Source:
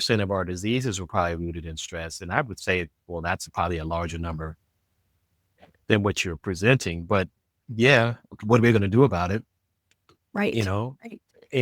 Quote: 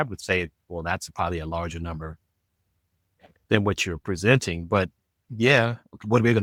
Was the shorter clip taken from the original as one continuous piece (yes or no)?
yes